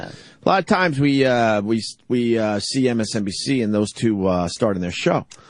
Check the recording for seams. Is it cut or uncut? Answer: cut